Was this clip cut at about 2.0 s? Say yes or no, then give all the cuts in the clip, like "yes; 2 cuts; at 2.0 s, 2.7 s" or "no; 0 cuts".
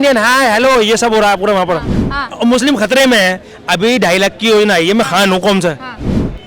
yes; 1 cut; at 2.0 s